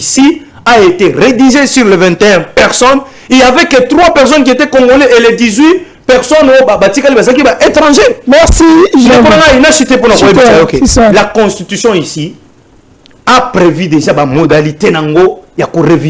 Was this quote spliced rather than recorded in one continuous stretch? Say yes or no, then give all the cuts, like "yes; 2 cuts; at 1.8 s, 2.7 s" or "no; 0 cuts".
no; 0 cuts